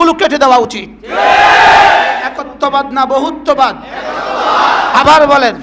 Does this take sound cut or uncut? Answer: cut